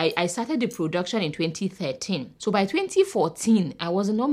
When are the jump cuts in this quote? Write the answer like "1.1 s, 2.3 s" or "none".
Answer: none